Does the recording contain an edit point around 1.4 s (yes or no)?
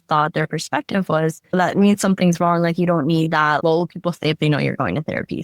yes